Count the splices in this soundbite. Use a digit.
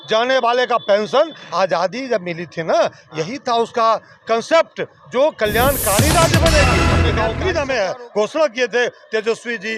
1